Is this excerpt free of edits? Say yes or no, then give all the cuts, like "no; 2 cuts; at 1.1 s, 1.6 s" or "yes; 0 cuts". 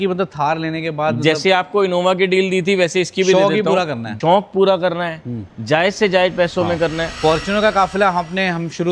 no; 1 cut; at 7.1 s